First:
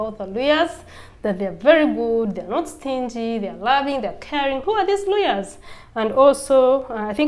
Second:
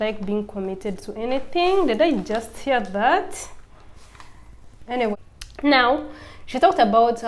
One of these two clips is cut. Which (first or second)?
second